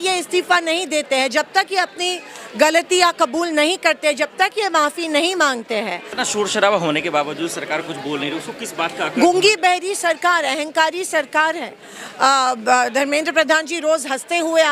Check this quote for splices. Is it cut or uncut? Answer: cut